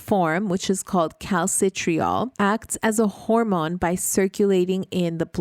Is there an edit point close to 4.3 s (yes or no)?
no